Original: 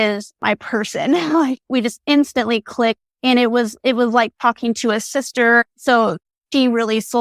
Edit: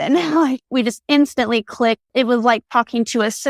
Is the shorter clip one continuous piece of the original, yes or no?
no